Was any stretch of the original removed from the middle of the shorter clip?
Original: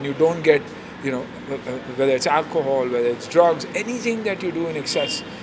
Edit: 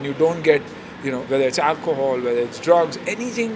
yes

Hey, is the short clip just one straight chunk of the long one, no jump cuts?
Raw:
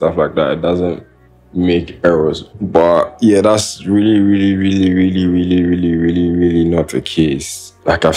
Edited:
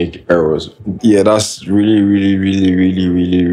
no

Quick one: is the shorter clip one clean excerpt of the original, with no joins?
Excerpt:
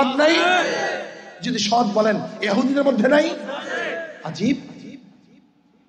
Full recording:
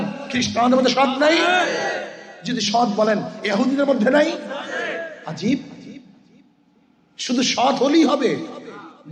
yes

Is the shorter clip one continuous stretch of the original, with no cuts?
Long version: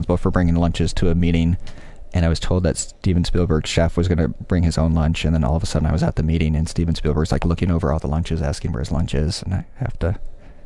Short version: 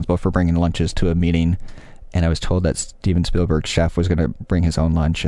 yes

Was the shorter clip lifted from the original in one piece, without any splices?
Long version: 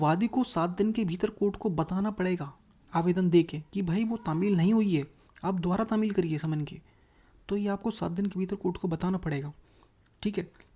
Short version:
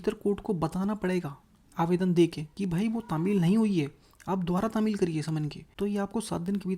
no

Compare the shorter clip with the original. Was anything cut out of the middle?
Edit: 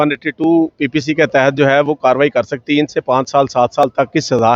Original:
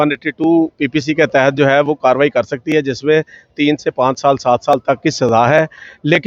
yes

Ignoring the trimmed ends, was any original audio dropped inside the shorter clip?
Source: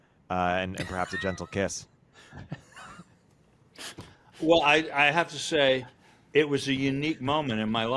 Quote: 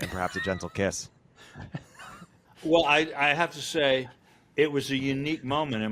yes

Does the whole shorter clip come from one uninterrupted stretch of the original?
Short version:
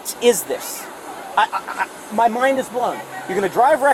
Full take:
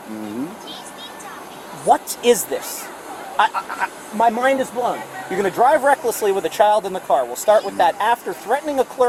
yes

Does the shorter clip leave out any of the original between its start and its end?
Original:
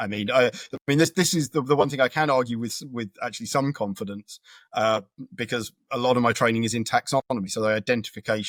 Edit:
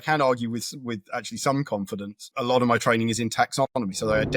yes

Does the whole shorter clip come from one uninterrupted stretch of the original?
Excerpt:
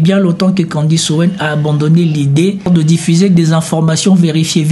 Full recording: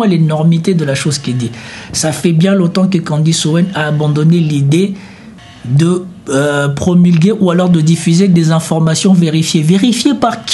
no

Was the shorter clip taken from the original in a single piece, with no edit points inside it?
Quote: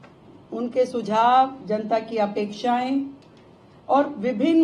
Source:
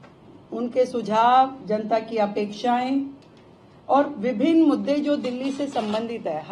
yes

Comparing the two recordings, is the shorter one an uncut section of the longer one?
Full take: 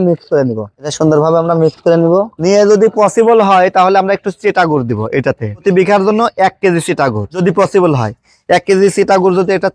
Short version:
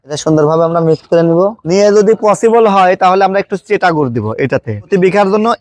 yes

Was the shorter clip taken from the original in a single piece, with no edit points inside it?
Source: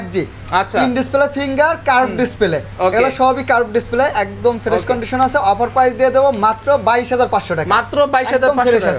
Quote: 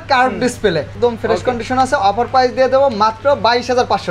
no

